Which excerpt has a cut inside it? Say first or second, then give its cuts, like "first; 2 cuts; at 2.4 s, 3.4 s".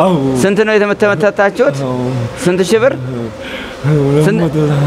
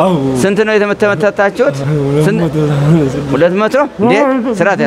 second; 1 cut; at 1.8 s